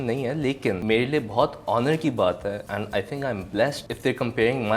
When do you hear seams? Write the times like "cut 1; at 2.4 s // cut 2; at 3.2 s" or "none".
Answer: cut 1; at 0.8 s // cut 2; at 2.6 s // cut 3; at 3.8 s